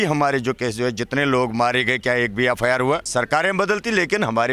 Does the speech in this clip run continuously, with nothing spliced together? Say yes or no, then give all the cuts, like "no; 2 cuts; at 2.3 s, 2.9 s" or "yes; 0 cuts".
no; 1 cut; at 3.1 s